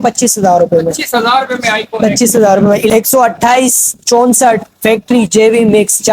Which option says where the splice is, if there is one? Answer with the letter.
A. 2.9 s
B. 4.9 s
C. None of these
A